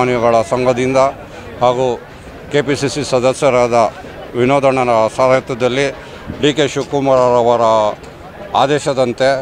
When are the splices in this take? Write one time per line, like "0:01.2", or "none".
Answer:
none